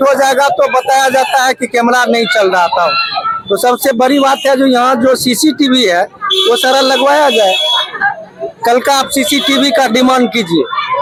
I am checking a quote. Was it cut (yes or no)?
no